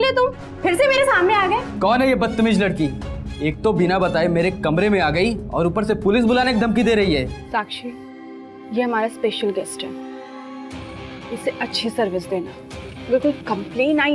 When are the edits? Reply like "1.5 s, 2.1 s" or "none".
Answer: 1.7 s, 7.4 s